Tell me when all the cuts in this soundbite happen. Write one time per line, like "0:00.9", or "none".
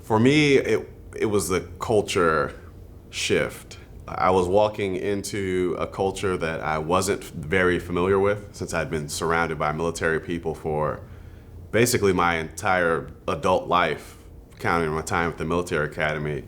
0:04.0